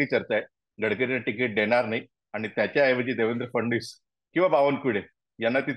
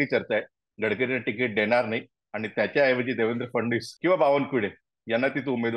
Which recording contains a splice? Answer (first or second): second